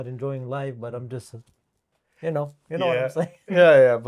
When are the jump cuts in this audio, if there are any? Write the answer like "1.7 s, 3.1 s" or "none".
none